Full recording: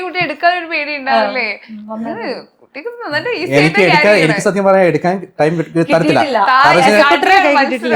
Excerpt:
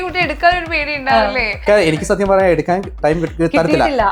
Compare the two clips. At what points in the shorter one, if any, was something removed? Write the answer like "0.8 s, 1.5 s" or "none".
1.7 s